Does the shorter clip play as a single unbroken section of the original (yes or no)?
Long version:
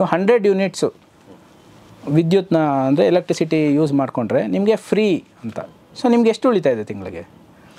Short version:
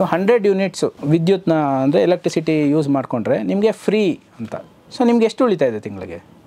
no